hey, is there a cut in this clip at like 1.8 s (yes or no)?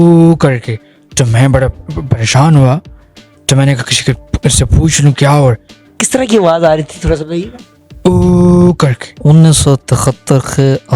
no